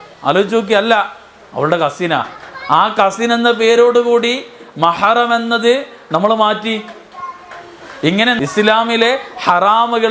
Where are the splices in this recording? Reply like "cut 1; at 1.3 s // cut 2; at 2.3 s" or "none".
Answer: cut 1; at 8.4 s

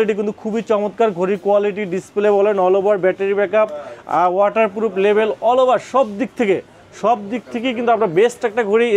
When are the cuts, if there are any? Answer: none

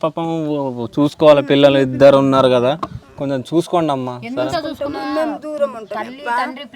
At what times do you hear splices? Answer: none

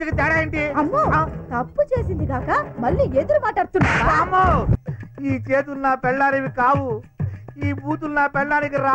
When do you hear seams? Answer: cut 1; at 4.8 s

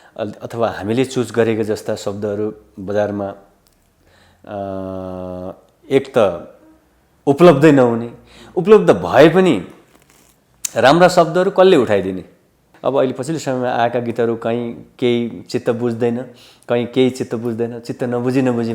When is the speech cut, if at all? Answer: cut 1; at 12.7 s

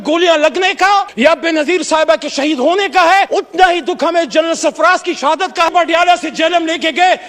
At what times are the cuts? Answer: cut 1; at 1.1 s // cut 2; at 3.3 s // cut 3; at 5.7 s

